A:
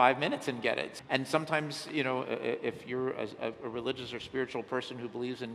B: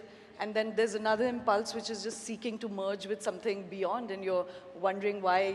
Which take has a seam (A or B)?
A